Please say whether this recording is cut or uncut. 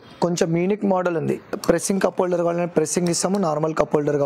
cut